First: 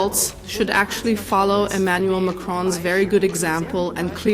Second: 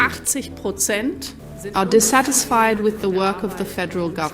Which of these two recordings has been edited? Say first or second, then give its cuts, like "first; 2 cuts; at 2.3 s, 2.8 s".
second; 1 cut; at 1.4 s